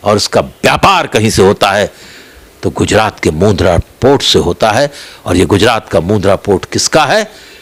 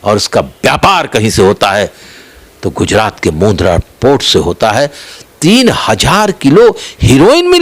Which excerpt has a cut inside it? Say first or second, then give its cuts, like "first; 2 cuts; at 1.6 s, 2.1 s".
second; 1 cut; at 5.1 s